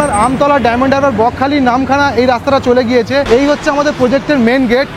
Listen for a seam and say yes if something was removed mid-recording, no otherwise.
yes